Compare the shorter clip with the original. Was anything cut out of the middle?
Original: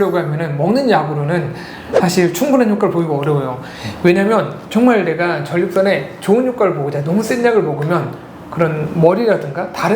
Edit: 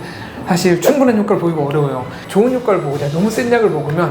yes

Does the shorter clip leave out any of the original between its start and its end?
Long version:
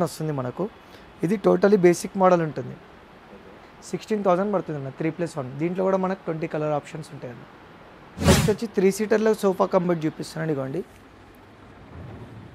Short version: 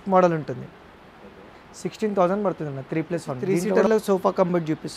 yes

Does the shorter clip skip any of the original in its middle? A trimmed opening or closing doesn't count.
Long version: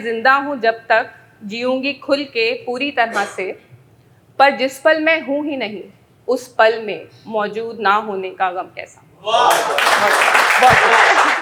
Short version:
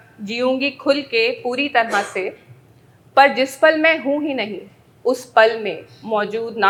no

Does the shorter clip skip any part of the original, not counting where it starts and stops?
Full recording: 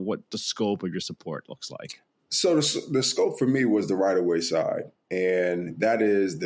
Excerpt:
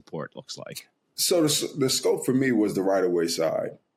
no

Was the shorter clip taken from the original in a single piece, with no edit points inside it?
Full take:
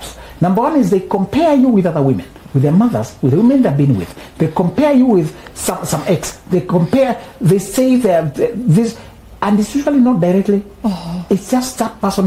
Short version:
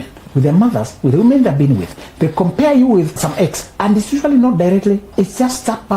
no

